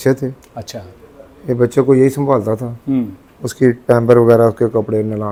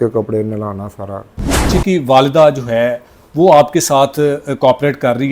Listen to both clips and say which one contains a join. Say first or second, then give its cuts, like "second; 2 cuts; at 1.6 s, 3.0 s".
second; 1 cut; at 1.7 s